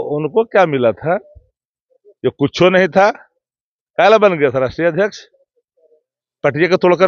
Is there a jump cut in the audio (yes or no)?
no